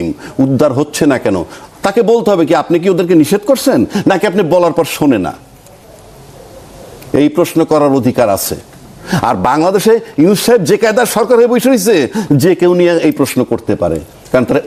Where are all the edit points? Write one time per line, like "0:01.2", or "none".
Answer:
none